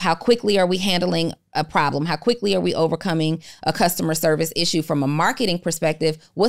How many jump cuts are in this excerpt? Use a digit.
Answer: 0